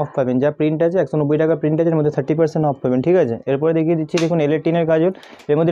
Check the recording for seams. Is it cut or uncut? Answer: uncut